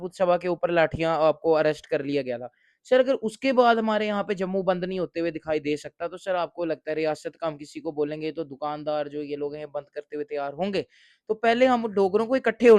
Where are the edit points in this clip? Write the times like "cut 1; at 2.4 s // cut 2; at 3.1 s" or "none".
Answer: none